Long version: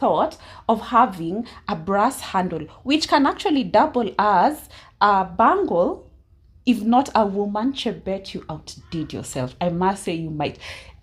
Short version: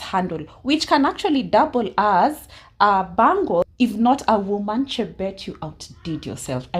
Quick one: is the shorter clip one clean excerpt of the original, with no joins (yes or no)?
no